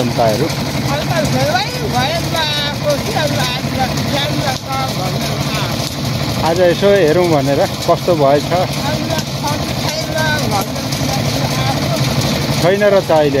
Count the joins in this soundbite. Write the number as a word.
zero